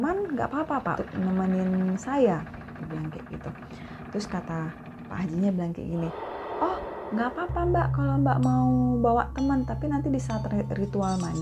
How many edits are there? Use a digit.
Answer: 1